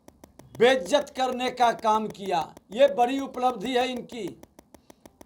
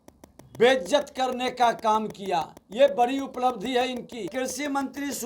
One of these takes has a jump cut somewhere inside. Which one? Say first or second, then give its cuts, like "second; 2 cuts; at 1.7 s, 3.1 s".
second; 1 cut; at 4.3 s